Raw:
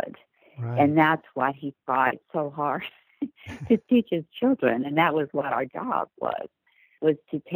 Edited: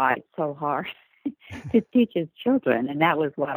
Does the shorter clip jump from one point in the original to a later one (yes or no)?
no